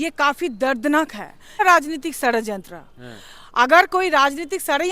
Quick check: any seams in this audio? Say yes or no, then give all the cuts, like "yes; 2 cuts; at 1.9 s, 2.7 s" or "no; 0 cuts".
yes; 1 cut; at 1.6 s